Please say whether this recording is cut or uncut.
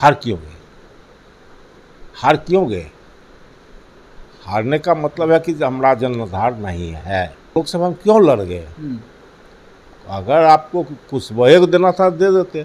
cut